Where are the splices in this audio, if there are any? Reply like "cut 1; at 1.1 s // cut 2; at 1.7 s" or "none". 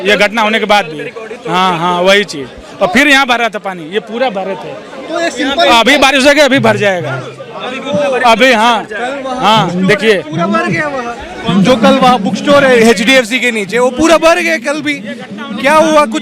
none